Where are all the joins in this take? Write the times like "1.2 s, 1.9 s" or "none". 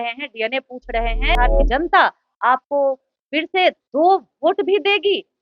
1.4 s